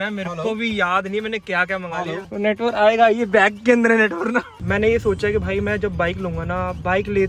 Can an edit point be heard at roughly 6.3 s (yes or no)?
no